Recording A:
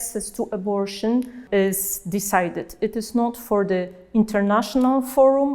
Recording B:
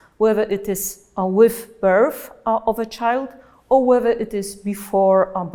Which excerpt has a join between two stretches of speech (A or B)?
A